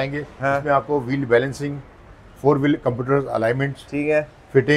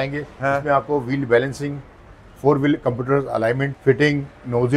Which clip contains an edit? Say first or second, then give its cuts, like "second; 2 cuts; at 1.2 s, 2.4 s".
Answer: second; 1 cut; at 3.7 s